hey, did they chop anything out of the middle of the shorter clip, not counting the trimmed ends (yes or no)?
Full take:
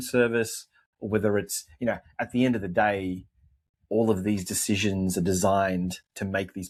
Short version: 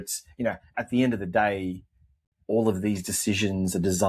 no